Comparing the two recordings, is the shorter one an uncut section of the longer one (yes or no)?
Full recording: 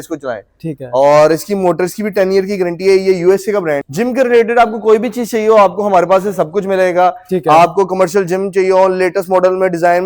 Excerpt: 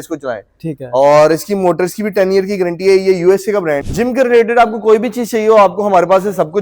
yes